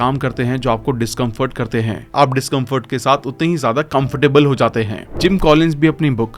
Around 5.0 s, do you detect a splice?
yes; 1 cut; at 5.0 s

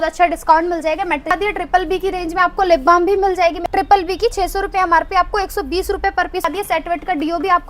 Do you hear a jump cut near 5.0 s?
no; 3 cuts; at 1.3 s, 3.6 s, 6.4 s

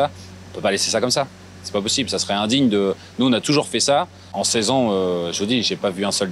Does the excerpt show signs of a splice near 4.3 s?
yes; 1 cut; at 4.3 s

